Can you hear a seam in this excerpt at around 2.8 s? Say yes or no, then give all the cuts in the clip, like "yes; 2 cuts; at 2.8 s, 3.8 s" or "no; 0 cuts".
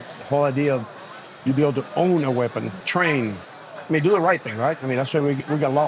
yes; 1 cut; at 2.8 s